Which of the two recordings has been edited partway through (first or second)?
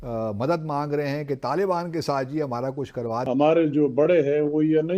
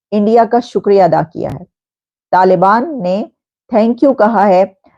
first